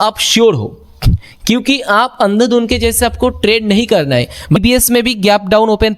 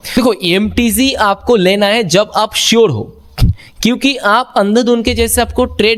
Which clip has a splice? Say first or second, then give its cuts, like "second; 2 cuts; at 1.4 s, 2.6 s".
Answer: first; 1 cut; at 4.6 s